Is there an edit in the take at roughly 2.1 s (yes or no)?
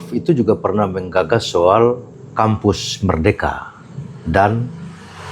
yes